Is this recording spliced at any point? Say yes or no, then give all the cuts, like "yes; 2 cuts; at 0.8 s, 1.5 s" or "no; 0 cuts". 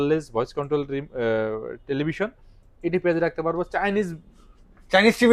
no; 0 cuts